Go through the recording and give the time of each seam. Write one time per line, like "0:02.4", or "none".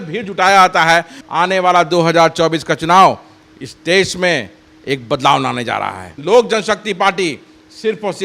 0:01.2
0:06.1